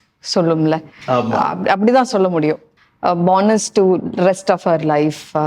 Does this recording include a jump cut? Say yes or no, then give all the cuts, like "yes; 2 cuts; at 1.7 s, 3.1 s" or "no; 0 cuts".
yes; 1 cut; at 2.7 s